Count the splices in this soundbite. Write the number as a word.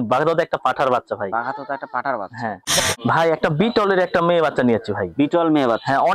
one